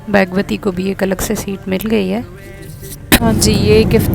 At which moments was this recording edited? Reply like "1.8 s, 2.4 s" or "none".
3.2 s